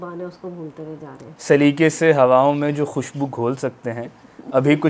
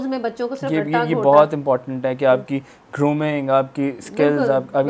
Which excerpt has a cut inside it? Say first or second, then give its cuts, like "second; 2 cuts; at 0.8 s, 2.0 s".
first; 1 cut; at 1.3 s